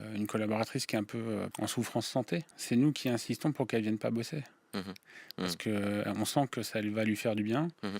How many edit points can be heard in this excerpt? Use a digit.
2